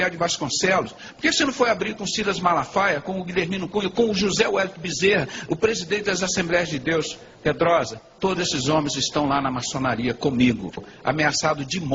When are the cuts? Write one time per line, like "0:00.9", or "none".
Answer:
0:10.8